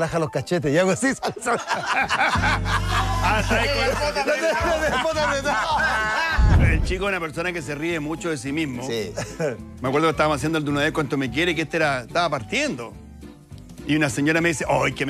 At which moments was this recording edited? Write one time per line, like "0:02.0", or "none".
0:06.6